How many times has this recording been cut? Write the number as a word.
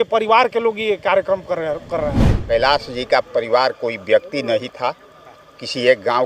one